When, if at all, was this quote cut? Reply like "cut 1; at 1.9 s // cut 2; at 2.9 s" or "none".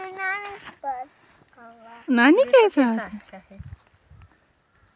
none